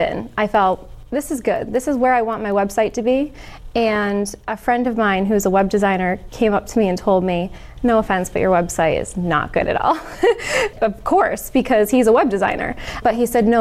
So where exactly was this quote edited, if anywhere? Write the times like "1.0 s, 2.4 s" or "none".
none